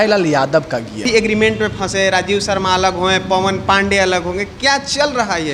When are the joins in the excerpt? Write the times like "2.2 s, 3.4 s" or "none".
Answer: 1.1 s